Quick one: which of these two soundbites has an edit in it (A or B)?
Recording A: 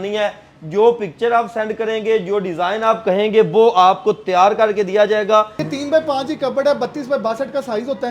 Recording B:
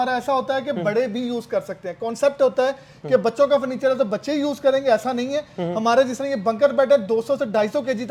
A